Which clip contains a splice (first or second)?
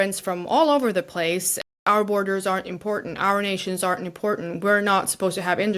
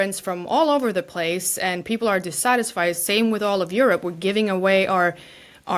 first